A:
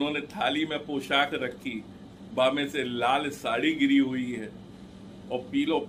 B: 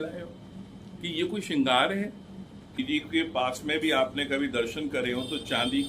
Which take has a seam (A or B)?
B